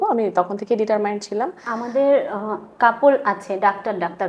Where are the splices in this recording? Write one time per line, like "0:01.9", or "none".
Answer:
0:01.6